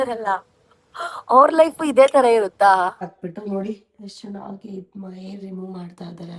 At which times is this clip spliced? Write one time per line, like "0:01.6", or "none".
0:03.0